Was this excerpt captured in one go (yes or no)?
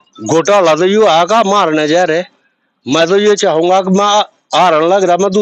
yes